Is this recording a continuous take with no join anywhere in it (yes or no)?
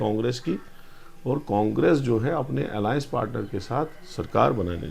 yes